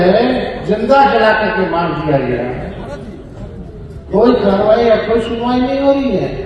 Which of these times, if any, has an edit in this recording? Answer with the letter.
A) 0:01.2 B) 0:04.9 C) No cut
C